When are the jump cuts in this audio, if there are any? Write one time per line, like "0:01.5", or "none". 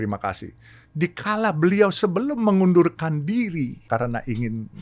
0:03.8